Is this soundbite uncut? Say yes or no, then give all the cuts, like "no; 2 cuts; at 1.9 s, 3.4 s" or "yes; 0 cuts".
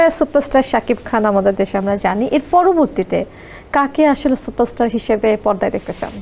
yes; 0 cuts